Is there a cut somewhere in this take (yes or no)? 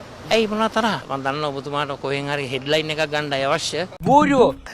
no